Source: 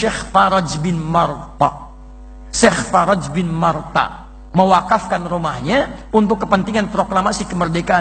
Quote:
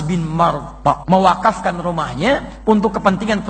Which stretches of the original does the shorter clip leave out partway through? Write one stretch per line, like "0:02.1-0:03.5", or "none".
0:01.8-0:04.5